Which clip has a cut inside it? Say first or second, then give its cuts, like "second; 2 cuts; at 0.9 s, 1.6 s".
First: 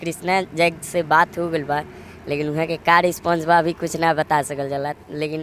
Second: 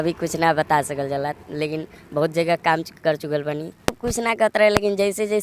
second; 1 cut; at 3.9 s